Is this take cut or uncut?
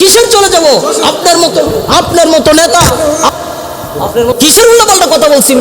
cut